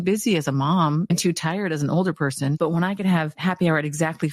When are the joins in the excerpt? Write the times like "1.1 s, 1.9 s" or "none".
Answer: 1.1 s, 2.6 s, 3.3 s